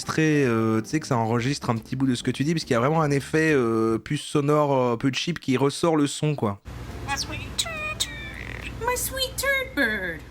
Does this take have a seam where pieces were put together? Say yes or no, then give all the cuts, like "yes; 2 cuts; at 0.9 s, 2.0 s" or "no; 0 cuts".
yes; 1 cut; at 6.6 s